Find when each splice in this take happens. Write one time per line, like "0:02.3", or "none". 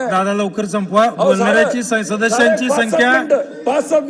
none

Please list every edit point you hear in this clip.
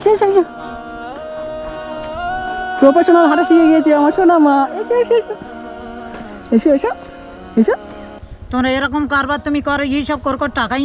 0:08.4

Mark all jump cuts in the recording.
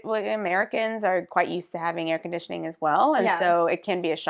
none

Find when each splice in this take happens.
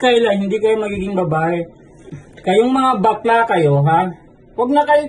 0:02.2

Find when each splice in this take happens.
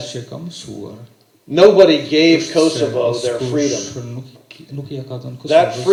none

